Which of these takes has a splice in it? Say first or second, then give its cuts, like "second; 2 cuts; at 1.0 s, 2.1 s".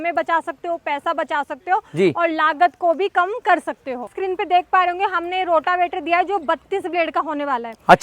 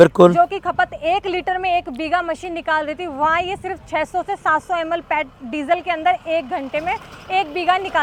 first; 1 cut; at 4.1 s